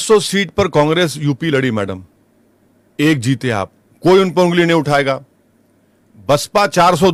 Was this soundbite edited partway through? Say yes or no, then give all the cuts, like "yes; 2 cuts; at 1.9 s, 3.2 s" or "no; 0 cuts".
no; 0 cuts